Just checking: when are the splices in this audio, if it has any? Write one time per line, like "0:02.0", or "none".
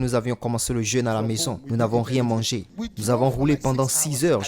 0:02.8